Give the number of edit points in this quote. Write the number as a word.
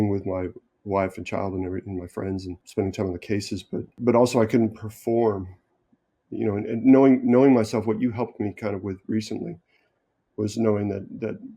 two